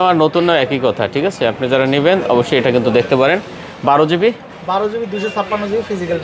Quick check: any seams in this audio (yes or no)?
no